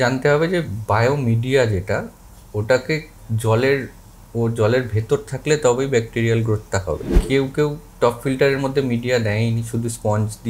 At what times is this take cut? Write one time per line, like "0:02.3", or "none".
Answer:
0:07.1